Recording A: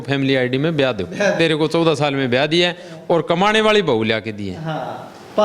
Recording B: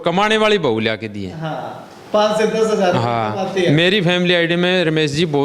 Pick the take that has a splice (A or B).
A